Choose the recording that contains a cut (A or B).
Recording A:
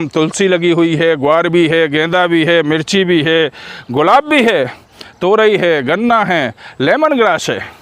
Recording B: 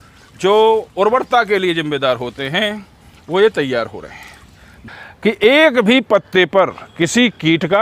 B